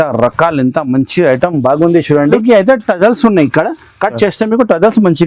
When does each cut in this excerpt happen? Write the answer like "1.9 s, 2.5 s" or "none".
2.3 s